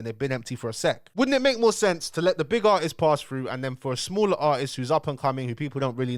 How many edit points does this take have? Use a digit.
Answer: 0